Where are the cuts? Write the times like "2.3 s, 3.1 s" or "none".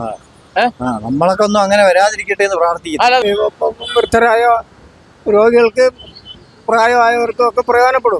3.2 s